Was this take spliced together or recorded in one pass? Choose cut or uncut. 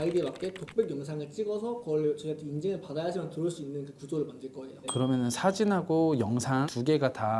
uncut